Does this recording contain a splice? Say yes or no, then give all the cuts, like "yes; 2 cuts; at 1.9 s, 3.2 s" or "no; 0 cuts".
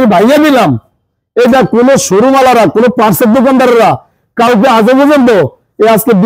no; 0 cuts